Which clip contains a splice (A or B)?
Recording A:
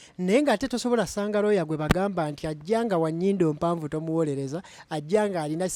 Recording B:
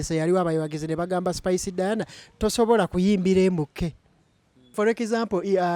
B